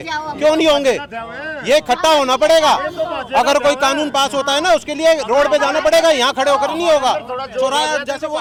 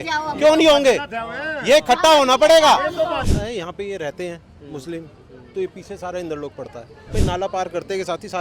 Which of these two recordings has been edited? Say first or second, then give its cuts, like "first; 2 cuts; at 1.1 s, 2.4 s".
second; 2 cuts; at 3.2 s, 7.1 s